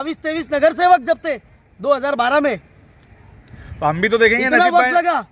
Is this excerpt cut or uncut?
uncut